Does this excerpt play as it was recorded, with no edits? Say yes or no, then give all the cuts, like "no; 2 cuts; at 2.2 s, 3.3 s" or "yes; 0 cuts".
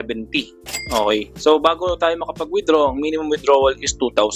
yes; 0 cuts